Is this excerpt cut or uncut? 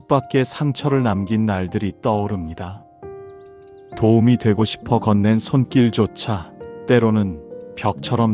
cut